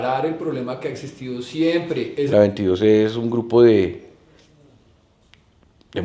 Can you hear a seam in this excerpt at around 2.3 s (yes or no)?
yes